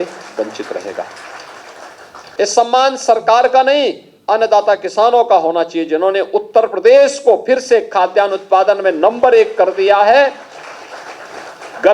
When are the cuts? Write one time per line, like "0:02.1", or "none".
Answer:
0:02.2